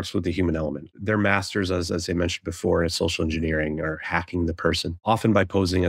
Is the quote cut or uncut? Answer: cut